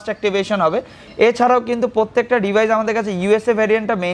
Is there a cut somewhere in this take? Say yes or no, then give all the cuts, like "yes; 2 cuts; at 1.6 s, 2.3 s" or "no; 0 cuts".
no; 0 cuts